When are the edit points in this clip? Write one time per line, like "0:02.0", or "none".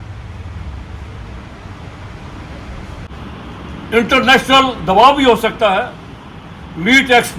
0:03.1